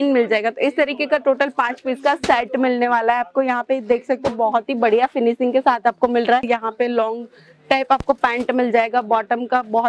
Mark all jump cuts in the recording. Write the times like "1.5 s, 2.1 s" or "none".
6.4 s